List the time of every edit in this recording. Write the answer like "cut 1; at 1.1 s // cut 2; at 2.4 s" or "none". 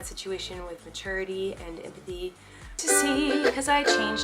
cut 1; at 2.7 s